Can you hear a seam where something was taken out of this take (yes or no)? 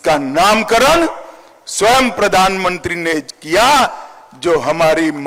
no